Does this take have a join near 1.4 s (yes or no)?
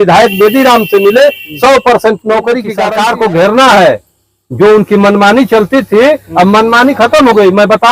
no